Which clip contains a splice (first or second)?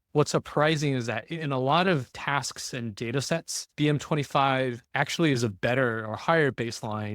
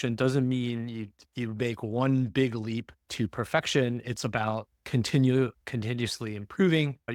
first